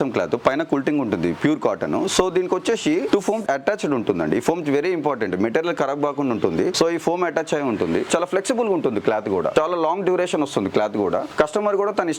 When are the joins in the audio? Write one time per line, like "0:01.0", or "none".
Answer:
none